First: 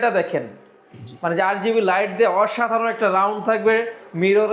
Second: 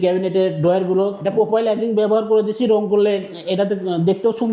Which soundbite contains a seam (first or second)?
second